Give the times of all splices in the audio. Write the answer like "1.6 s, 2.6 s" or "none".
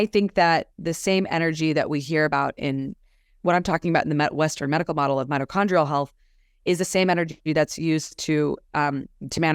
none